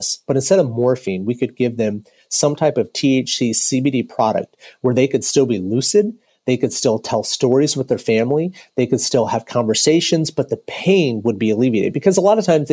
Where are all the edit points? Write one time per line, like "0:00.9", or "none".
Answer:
none